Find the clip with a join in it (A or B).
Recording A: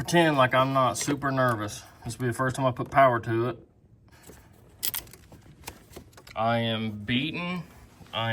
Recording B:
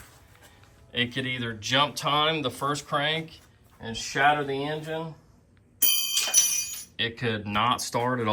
A